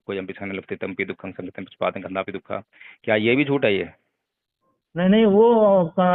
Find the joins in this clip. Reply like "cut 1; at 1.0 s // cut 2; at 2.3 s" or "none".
none